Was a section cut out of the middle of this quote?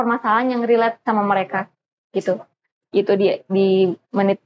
no; 0 cuts

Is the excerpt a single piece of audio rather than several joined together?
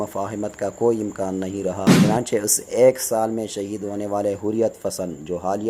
no; 1 cut; at 1.9 s

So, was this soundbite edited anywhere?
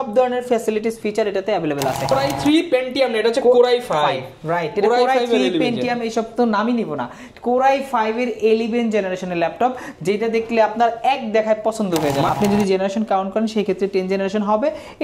yes; 2 cuts; at 2.1 s, 12.3 s

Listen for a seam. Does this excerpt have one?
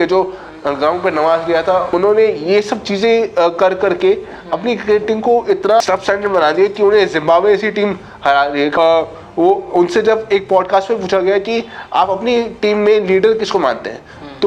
yes; 3 cuts; at 1.9 s, 5.8 s, 8.7 s

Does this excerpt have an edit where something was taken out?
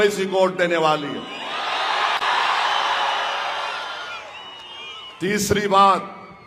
no; 0 cuts

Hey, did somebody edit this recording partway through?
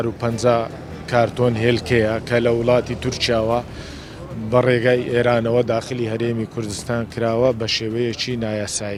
no; 0 cuts

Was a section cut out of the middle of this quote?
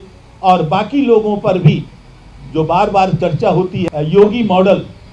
yes; 1 cut; at 3.8 s

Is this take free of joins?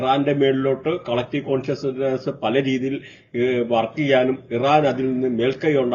yes; 0 cuts

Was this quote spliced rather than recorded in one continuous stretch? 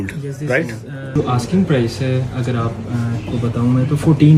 yes; 1 cut; at 1.2 s

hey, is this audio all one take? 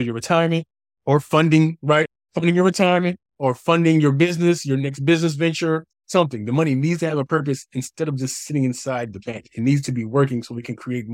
no; 2 cuts; at 2.2 s, 5.9 s

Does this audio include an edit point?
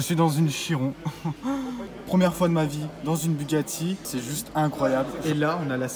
yes; 3 cuts; at 1.9 s, 4.1 s, 5.1 s

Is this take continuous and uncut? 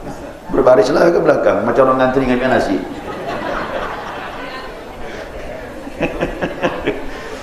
yes; 0 cuts

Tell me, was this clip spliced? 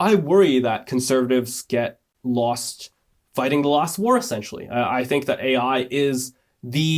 no; 0 cuts

